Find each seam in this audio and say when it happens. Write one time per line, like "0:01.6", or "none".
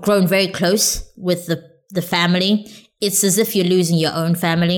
none